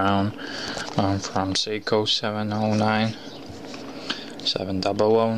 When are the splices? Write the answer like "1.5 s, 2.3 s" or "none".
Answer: 3.6 s

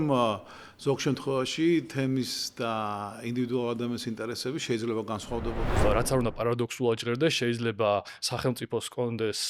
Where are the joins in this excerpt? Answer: 5.8 s

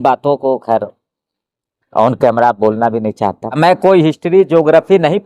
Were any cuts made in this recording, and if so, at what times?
3.6 s

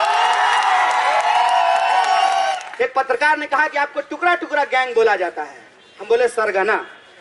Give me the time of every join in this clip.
2.6 s

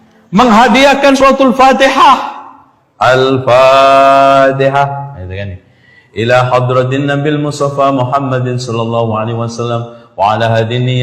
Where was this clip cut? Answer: 1.2 s

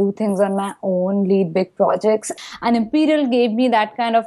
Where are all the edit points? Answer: 2.3 s

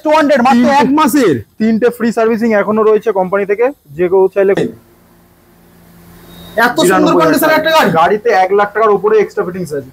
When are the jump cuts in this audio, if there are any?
4.6 s

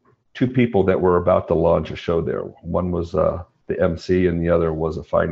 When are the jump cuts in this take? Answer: none

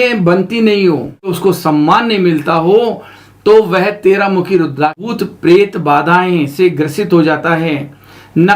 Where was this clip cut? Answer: 1.3 s, 5.1 s

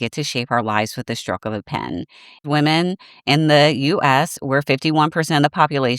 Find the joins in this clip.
2.4 s

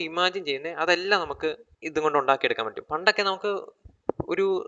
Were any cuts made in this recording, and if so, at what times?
1.7 s

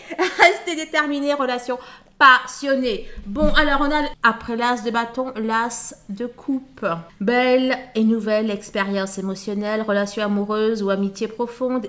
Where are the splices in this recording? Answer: 4.1 s

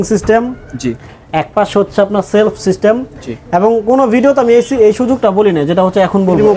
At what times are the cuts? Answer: none

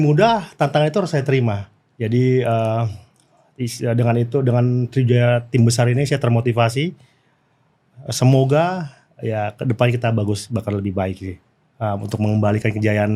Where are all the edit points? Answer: none

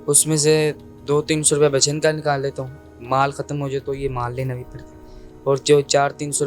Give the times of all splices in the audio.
none

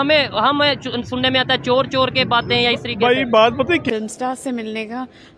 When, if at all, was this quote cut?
3.8 s

